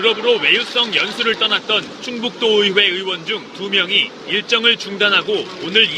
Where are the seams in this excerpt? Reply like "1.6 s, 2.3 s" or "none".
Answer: none